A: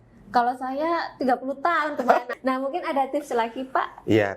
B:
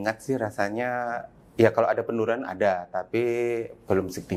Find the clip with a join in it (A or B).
A